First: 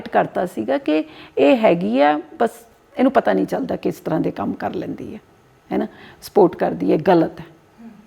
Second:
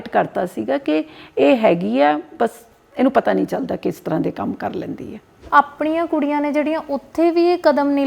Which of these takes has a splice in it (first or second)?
second